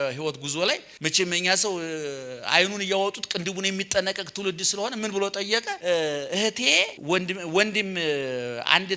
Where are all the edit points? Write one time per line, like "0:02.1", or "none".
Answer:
0:00.9
0:05.7
0:07.0